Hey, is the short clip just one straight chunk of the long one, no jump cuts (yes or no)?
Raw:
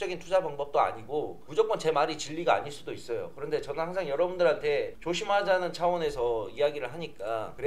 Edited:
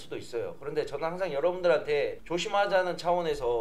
yes